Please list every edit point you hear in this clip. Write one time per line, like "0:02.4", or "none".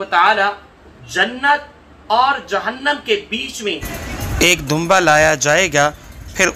0:03.9